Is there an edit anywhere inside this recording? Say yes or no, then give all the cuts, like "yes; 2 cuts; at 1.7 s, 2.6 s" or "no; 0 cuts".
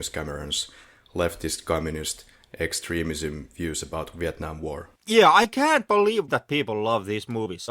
yes; 2 cuts; at 4.9 s, 6.2 s